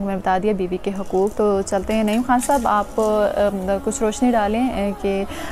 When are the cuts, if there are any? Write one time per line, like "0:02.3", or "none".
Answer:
none